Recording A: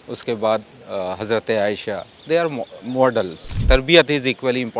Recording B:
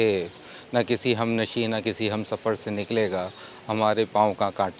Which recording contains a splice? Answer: A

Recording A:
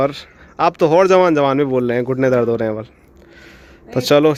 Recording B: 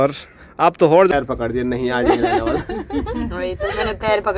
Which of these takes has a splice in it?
B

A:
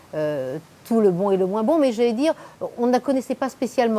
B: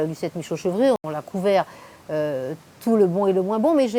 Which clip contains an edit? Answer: B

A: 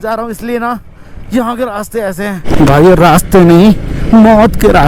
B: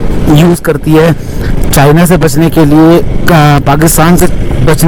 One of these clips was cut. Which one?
A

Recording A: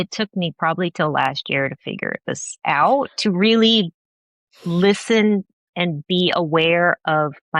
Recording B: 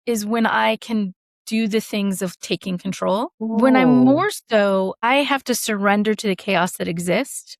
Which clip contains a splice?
B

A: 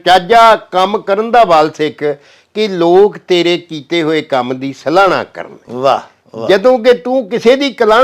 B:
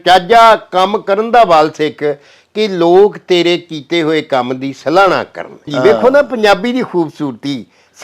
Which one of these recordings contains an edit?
B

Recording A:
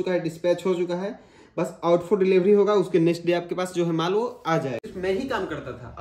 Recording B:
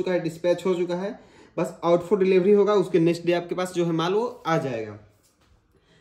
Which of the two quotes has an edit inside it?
A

